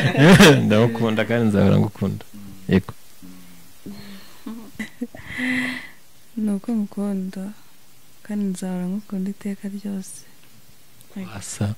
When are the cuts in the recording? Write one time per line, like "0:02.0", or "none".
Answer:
0:04.7

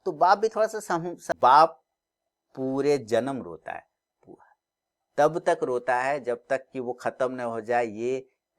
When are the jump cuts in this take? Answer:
0:01.3

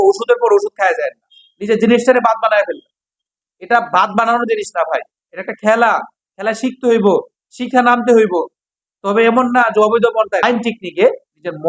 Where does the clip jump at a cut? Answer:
0:10.4

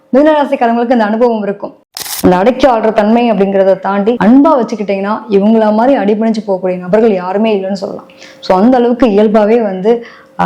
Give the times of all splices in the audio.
0:02.0

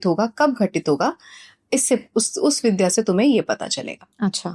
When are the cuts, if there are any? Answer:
none

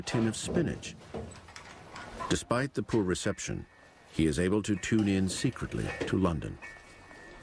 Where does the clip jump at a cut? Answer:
none

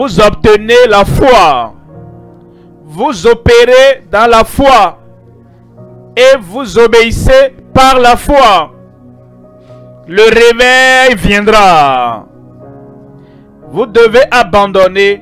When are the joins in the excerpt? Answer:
0:08.7
0:10.0

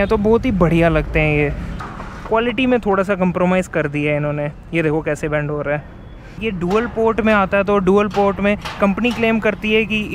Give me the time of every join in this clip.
0:01.7
0:06.3

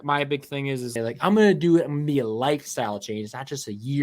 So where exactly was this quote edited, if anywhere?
0:00.9

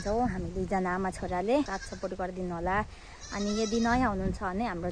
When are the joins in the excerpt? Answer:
0:01.8

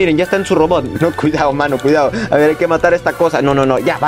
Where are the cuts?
0:01.0

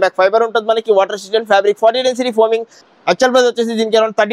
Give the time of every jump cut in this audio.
none

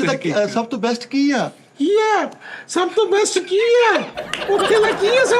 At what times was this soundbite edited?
0:01.6

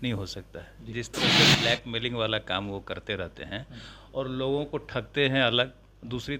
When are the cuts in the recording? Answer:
none

